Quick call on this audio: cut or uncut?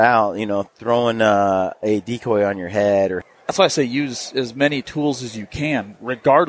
cut